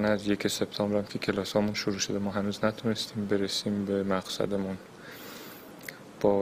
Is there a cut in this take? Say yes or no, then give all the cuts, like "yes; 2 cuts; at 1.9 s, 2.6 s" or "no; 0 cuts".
no; 0 cuts